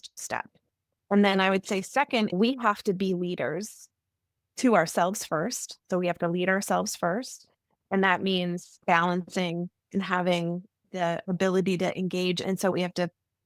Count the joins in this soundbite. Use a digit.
3